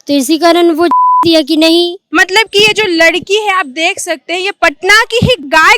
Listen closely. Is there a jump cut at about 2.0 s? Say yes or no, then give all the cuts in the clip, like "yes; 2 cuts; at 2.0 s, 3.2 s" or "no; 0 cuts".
yes; 1 cut; at 2.0 s